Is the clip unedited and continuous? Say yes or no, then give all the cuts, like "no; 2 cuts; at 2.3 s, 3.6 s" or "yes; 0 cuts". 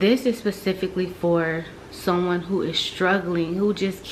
yes; 0 cuts